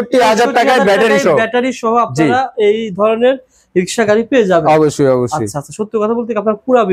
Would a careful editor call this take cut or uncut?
uncut